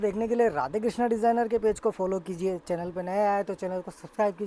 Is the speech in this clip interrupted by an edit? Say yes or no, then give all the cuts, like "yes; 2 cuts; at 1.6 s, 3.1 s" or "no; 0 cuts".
no; 0 cuts